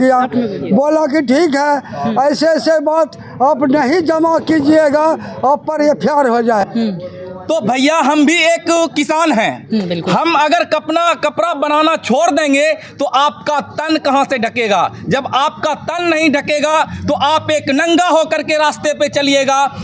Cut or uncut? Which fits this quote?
cut